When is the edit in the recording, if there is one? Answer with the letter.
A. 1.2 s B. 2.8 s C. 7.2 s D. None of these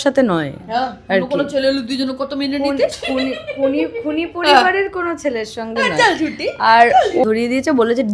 C